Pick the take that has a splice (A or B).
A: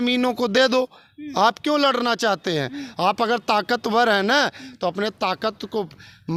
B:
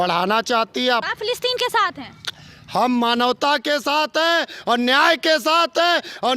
B